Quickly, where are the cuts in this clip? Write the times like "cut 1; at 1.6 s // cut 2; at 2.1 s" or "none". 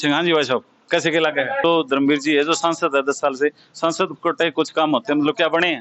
cut 1; at 1.6 s